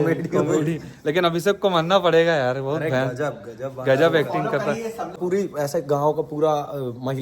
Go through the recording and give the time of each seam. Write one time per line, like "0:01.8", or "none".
0:05.2